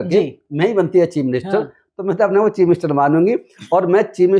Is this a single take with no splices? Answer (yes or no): yes